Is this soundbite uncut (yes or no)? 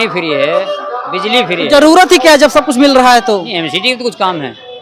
yes